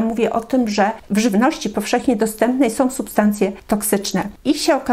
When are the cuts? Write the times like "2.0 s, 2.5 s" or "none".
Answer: 1.0 s, 3.7 s